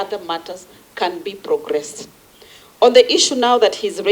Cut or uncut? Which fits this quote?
uncut